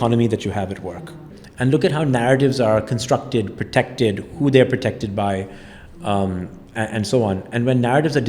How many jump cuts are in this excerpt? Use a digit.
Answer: 1